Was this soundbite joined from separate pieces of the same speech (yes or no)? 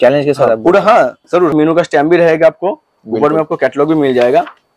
yes